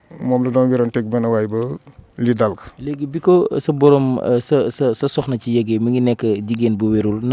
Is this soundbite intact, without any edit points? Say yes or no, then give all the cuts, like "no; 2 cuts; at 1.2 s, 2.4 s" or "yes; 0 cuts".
yes; 0 cuts